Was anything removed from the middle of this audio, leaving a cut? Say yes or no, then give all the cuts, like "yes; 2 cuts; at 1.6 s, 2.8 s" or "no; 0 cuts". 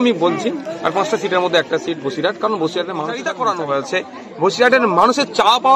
yes; 1 cut; at 3.3 s